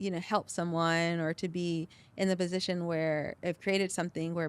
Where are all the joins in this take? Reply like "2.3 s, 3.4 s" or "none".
3.4 s